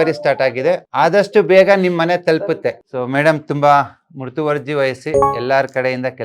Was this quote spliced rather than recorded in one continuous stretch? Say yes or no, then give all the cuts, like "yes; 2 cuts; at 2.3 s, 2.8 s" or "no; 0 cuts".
yes; 2 cuts; at 0.9 s, 2.9 s